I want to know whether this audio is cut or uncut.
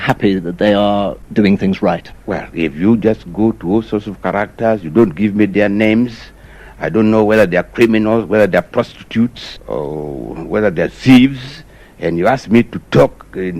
cut